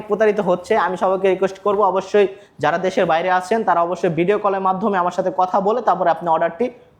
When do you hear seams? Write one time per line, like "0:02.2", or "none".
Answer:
none